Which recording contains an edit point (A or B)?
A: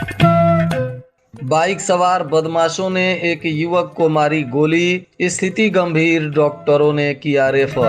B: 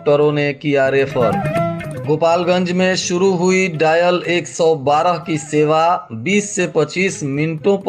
A